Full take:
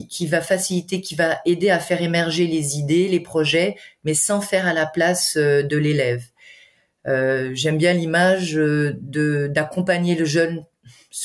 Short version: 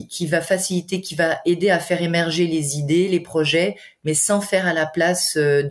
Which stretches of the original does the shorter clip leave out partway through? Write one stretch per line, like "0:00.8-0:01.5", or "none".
none